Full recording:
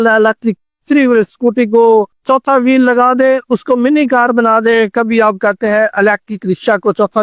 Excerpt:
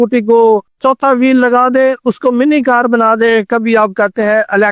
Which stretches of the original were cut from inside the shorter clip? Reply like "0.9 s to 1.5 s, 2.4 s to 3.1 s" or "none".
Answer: none